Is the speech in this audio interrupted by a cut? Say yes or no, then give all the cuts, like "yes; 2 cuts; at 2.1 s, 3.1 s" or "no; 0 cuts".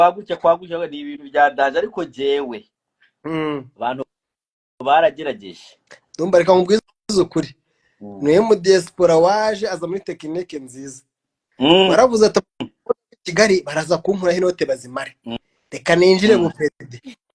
no; 0 cuts